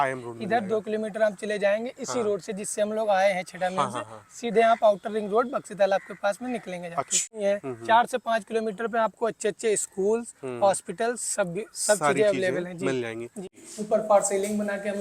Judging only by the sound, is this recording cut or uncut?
cut